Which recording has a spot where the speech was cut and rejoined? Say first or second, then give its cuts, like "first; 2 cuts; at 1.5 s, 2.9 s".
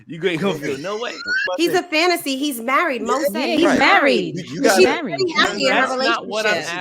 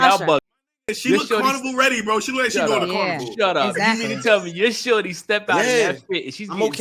first; 1 cut; at 1.3 s